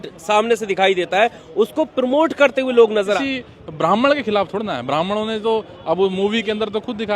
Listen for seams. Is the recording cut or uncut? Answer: cut